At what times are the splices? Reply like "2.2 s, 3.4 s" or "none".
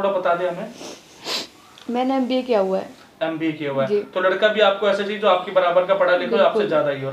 none